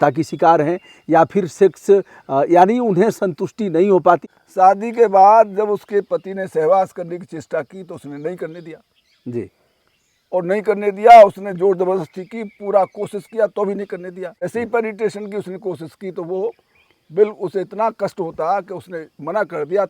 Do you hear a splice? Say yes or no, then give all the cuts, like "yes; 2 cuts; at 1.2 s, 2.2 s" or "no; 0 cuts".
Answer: yes; 2 cuts; at 4.4 s, 14.5 s